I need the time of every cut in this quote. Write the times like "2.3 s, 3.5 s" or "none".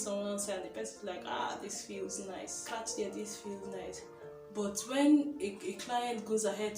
2.6 s